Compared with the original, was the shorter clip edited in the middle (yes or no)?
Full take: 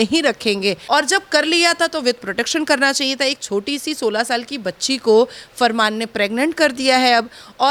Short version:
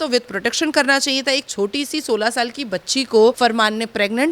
yes